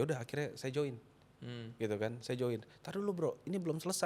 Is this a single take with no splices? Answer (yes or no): yes